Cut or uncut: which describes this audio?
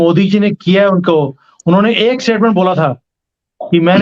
uncut